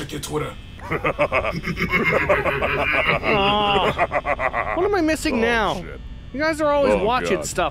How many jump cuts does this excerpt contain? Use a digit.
0